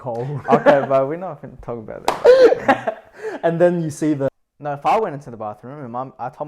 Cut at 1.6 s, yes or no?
no